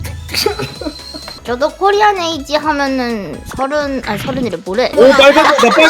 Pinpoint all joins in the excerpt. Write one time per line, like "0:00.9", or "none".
0:01.2
0:04.9